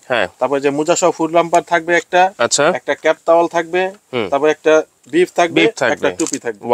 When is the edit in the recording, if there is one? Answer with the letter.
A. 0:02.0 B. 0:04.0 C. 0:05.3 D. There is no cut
D